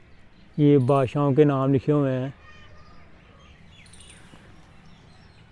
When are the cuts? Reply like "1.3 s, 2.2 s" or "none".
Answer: none